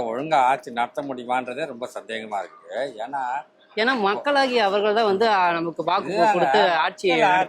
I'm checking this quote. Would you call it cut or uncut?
uncut